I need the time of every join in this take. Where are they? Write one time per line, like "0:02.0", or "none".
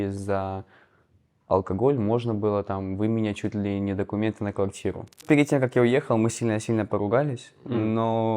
0:05.2